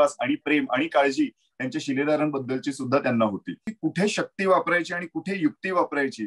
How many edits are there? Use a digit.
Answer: 1